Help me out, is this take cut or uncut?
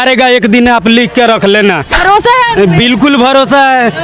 cut